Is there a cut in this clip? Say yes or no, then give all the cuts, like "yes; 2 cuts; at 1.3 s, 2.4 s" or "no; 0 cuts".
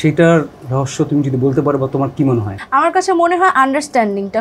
yes; 1 cut; at 2.6 s